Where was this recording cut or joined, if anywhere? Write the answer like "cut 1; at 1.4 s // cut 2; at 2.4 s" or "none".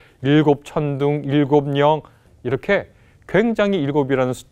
cut 1; at 2.3 s